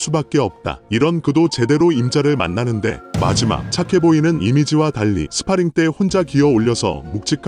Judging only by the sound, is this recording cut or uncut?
cut